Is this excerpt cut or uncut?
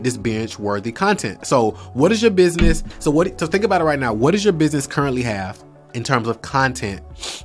uncut